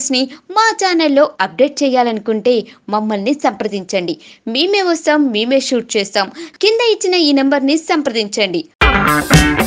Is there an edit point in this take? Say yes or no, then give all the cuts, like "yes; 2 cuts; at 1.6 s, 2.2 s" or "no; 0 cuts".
no; 0 cuts